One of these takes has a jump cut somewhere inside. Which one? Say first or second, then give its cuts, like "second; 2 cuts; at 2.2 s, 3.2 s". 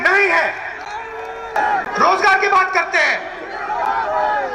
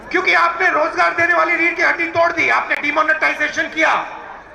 first; 1 cut; at 1.6 s